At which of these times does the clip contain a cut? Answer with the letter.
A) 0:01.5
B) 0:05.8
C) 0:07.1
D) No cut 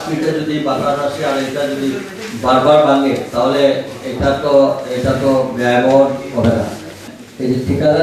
C